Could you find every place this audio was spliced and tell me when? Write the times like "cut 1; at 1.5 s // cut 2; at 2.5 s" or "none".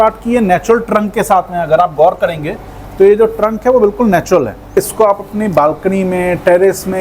cut 1; at 4.7 s